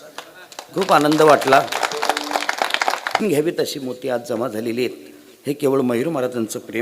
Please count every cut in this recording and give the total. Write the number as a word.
one